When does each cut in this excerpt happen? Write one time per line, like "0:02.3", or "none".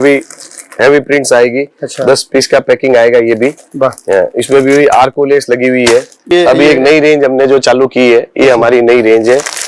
0:06.3